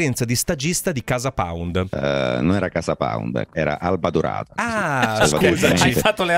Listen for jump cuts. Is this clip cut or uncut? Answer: cut